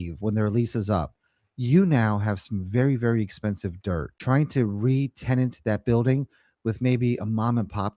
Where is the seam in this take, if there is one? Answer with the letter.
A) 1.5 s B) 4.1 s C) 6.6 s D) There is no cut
B